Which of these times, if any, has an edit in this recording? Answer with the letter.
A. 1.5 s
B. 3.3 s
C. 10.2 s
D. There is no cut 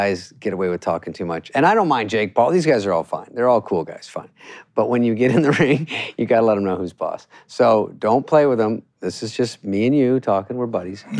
A